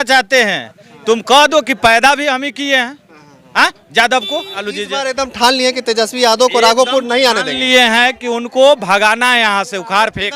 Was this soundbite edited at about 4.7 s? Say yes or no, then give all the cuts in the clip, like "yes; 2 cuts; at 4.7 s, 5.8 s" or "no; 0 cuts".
yes; 1 cut; at 4.7 s